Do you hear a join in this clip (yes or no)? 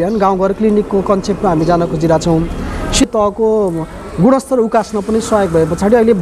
yes